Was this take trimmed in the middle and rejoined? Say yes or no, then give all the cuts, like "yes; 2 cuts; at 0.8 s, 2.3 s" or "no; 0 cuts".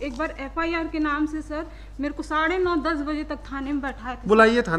no; 0 cuts